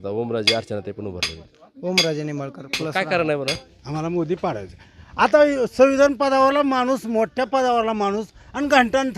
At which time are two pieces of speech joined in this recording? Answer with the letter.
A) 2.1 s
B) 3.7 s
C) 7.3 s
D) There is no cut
B